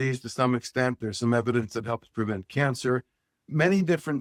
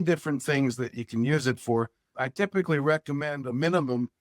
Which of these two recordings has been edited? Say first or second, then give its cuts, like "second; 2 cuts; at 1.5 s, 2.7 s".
second; 1 cut; at 2.1 s